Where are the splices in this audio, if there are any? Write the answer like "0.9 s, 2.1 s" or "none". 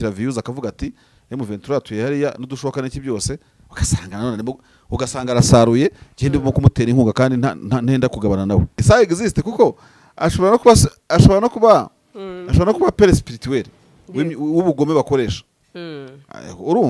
8.8 s